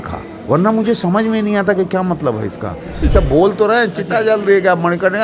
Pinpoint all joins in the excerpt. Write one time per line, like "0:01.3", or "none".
0:03.0